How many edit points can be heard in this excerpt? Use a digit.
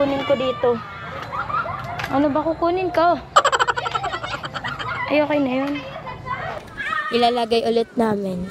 1